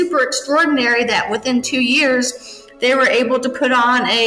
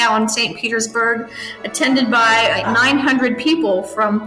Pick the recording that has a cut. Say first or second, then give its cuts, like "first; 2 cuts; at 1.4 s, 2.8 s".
second; 1 cut; at 2.7 s